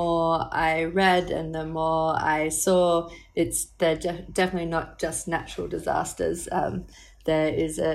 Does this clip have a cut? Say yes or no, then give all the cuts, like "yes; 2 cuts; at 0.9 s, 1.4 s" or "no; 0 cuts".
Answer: no; 0 cuts